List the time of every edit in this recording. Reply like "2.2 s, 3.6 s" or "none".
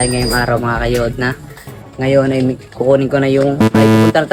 none